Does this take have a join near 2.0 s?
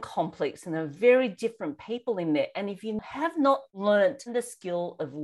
no; 2 cuts; at 3.4 s, 4.3 s

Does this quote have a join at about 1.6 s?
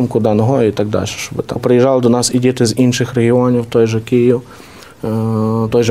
yes; 1 cut; at 1.6 s

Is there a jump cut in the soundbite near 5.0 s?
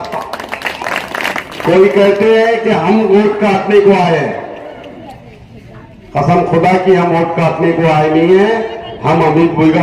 no; 1 cut; at 1.3 s

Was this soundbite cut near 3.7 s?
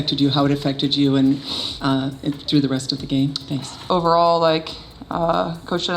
yes; 1 cut; at 3.7 s

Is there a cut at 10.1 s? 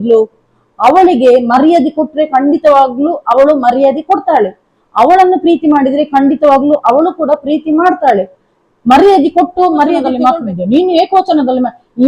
yes; 1 cut; at 10.1 s

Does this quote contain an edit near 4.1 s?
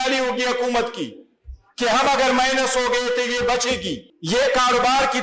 yes; 1 cut; at 4.1 s

